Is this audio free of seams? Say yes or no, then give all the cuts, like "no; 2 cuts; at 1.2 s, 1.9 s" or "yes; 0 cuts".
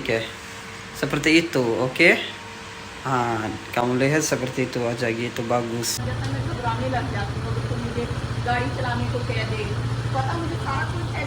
no; 1 cut; at 6.0 s